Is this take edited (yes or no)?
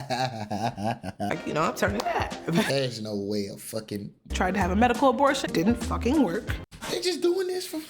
yes